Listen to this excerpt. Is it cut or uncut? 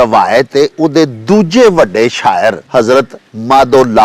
cut